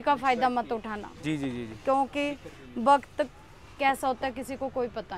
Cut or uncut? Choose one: uncut